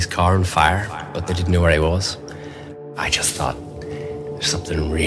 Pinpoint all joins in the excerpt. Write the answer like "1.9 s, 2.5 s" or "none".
1.1 s, 2.9 s